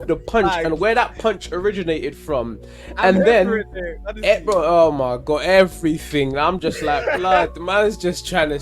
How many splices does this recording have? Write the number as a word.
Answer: zero